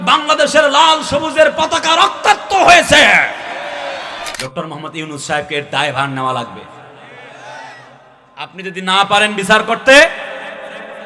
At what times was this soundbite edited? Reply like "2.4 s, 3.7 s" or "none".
4.3 s